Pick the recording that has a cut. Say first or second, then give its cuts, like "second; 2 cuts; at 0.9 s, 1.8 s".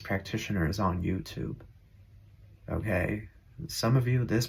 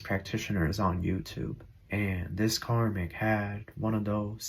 second; 1 cut; at 1.7 s